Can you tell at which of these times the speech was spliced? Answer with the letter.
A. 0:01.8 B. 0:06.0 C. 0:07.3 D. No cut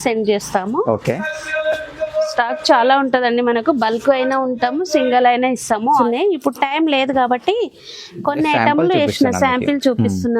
B